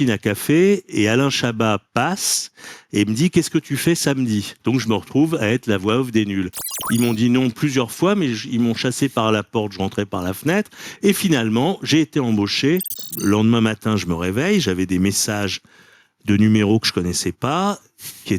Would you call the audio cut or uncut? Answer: cut